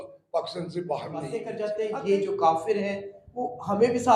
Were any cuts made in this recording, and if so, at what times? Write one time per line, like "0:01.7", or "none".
0:01.4